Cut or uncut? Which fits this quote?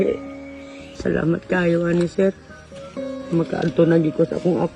cut